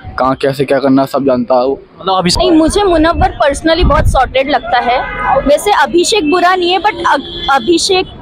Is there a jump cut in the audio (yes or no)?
yes